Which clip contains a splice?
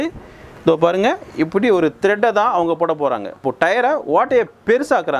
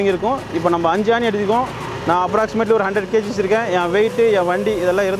first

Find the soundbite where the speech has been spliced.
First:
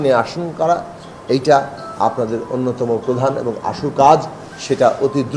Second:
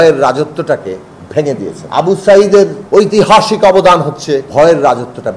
second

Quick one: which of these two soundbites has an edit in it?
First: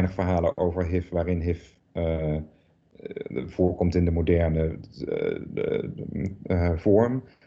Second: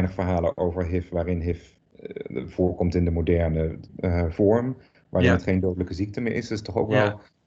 second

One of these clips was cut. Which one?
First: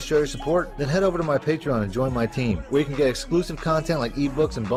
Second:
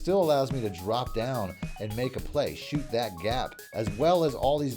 second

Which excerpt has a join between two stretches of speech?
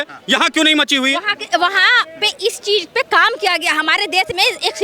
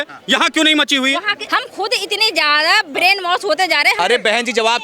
second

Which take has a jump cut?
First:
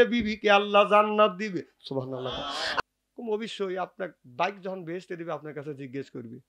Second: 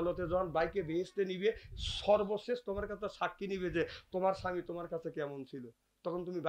first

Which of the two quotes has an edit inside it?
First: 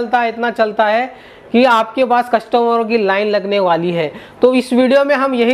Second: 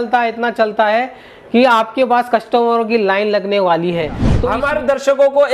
second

